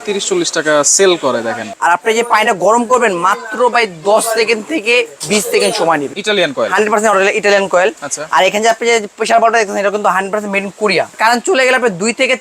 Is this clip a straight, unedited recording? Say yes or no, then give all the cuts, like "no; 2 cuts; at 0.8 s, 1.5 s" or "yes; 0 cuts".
no; 3 cuts; at 1.7 s, 6.1 s, 11.1 s